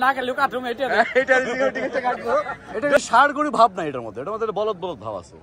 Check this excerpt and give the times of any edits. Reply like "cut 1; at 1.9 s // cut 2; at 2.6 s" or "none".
cut 1; at 3.0 s